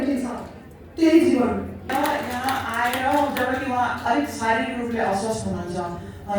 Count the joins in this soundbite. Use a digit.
1